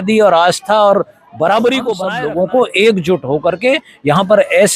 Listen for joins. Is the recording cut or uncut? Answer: cut